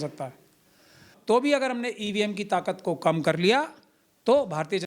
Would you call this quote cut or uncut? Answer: cut